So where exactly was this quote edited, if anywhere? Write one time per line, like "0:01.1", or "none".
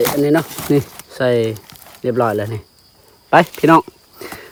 none

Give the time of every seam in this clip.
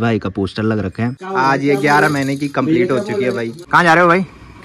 0:01.2
0:03.6

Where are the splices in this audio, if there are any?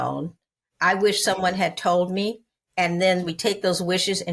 0:03.2

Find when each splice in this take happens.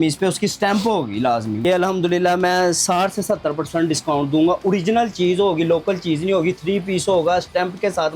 0:01.6

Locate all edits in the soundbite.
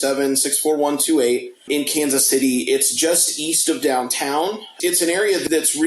0:01.5
0:04.7

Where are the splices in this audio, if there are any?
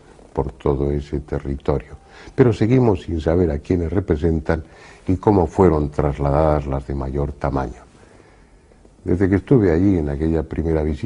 0:07.0

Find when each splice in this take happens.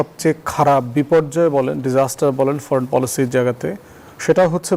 none

